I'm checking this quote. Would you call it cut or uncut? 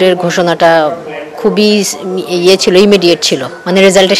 uncut